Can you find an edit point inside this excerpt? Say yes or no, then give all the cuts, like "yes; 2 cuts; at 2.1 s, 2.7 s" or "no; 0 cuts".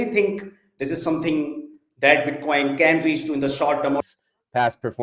yes; 1 cut; at 4.0 s